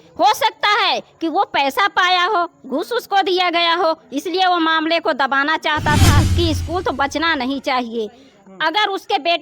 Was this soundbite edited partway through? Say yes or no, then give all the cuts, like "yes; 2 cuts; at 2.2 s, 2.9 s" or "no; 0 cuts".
yes; 1 cut; at 6.2 s